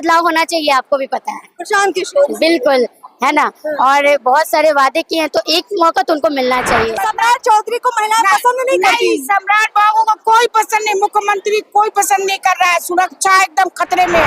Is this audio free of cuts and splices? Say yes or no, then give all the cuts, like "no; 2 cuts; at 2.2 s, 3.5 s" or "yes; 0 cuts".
no; 1 cut; at 7.0 s